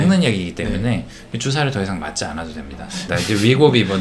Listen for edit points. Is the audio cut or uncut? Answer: cut